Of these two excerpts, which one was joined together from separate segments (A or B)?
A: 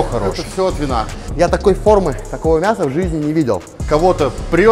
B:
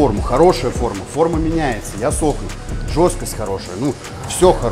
A